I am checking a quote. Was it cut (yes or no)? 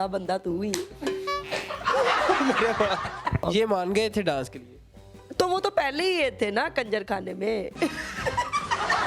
yes